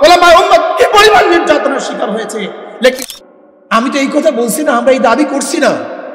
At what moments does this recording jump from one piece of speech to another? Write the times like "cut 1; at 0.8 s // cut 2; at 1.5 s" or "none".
cut 1; at 3.0 s